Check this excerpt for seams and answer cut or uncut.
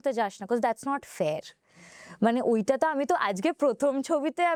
uncut